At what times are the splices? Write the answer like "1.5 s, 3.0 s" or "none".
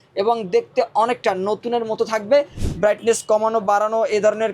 2.6 s